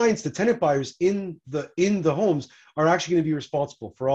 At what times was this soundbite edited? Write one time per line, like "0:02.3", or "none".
none